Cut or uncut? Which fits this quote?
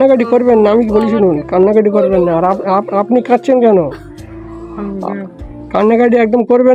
uncut